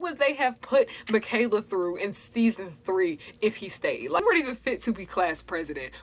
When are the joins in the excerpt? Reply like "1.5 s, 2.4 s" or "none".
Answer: 4.2 s